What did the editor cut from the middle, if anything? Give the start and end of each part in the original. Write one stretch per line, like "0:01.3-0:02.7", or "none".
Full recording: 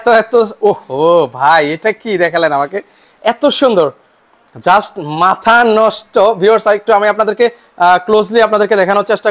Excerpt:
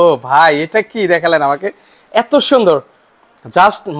none